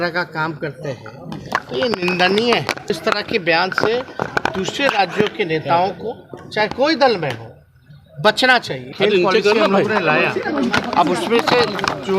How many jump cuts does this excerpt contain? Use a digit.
2